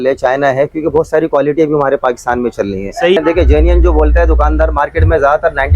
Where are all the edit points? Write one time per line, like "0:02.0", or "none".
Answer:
0:03.2